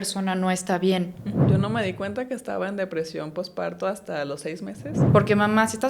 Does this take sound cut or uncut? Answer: cut